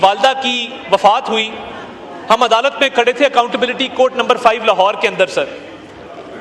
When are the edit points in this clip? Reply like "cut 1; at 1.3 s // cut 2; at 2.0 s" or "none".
none